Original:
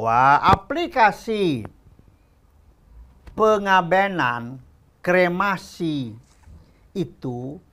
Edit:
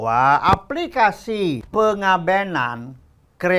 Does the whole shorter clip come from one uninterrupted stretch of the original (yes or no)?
no